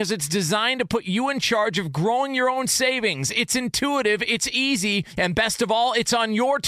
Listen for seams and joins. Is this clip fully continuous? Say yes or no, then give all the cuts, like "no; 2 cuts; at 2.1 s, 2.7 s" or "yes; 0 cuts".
yes; 0 cuts